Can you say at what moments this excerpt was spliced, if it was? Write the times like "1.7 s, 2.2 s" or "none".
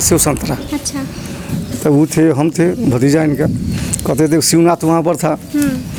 none

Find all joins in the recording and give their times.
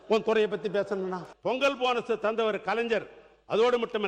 1.3 s

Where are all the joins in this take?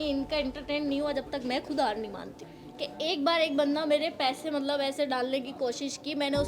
2.4 s

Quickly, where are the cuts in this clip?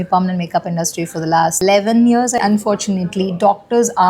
1.6 s, 2.4 s

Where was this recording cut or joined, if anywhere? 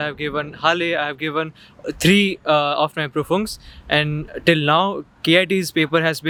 none

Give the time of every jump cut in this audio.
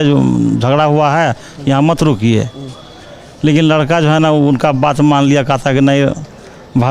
none

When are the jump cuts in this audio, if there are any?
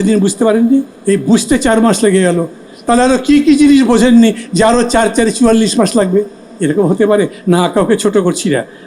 0.9 s

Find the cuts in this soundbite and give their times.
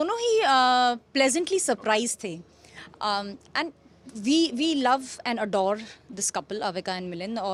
none

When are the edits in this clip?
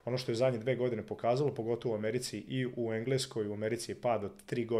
none

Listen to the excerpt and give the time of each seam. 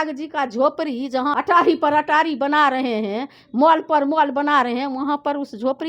1.3 s

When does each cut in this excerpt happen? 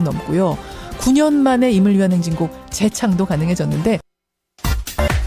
1.5 s

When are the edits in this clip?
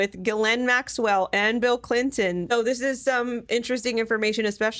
2.5 s

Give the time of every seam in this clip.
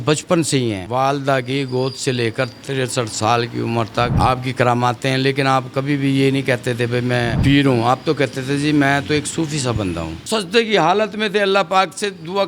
0.8 s, 4.1 s, 7.3 s, 10.1 s

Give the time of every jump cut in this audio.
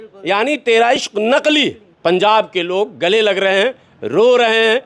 1.9 s

